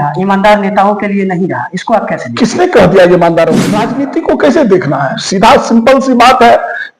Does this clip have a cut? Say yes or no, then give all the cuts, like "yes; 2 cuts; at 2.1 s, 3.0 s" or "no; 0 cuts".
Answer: yes; 1 cut; at 3.8 s